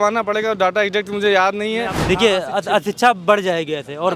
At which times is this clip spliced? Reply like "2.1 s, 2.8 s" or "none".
1.9 s